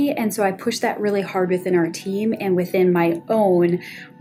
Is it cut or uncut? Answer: uncut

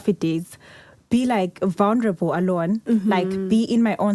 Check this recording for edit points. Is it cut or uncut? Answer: uncut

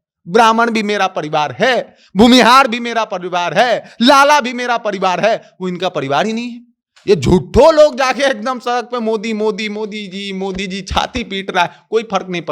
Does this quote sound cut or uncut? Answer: uncut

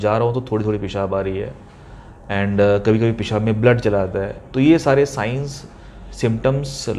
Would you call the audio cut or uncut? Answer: uncut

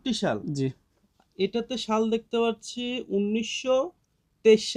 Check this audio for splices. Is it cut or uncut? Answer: uncut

